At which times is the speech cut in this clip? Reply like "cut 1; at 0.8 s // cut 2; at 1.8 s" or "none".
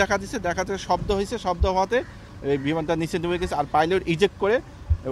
none